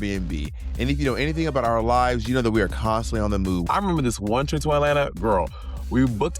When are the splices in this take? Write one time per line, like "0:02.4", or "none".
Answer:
0:03.6